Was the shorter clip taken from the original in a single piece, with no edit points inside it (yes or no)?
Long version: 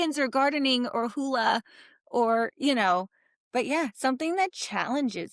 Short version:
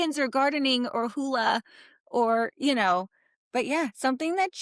yes